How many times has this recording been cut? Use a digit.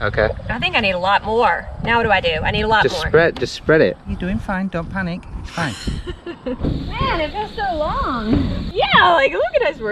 3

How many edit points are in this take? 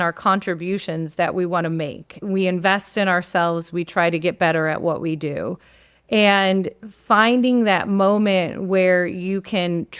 1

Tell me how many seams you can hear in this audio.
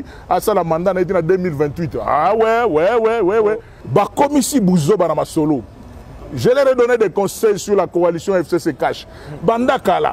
1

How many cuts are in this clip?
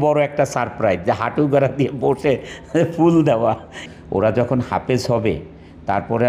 1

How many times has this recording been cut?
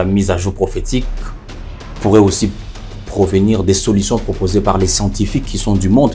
0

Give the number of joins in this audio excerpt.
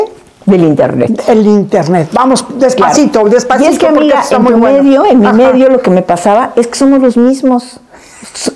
0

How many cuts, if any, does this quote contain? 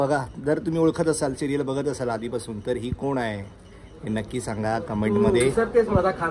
0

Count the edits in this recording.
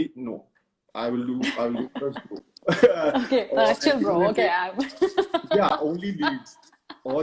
0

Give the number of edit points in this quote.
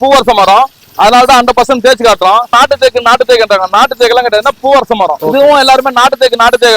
2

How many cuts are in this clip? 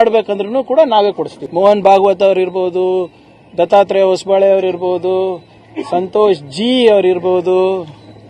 1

